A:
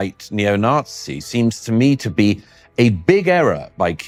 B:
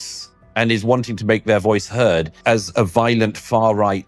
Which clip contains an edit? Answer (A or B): B